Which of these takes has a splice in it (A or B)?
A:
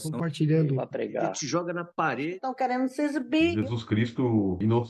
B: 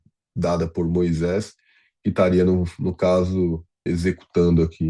B